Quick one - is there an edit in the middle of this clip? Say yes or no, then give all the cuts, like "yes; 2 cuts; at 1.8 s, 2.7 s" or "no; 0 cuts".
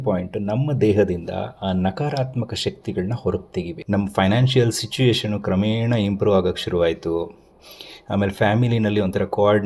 yes; 1 cut; at 3.8 s